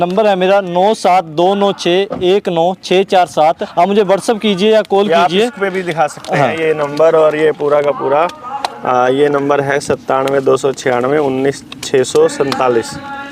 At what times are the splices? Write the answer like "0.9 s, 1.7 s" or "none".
3.6 s

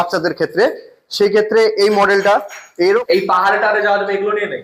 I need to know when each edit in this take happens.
2.6 s

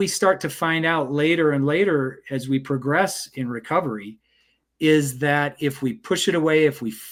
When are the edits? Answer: none

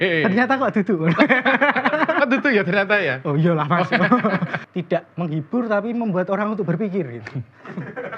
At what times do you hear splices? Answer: 4.6 s

